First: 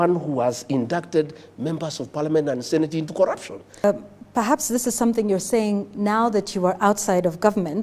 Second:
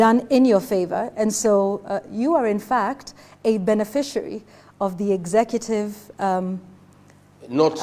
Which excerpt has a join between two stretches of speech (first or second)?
first